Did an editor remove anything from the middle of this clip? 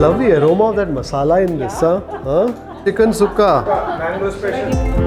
no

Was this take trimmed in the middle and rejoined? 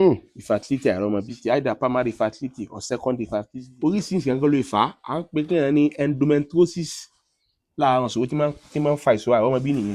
yes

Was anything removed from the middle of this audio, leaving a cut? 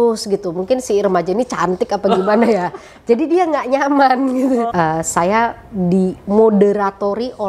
yes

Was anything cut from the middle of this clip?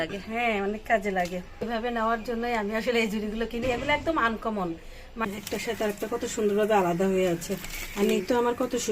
yes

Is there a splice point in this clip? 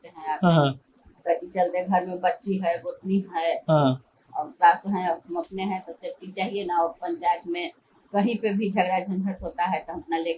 no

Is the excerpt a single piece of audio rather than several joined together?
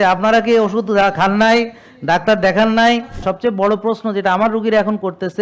no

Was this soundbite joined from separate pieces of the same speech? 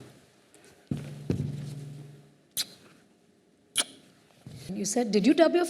yes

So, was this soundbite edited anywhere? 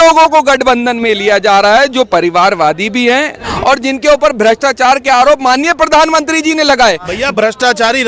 yes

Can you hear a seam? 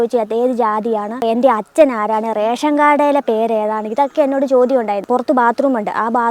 yes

